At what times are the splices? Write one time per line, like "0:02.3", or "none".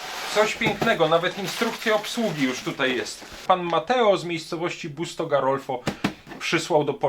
0:03.4